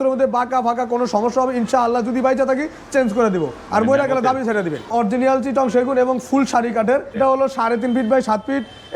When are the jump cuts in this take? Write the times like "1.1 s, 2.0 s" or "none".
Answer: 4.9 s, 7.2 s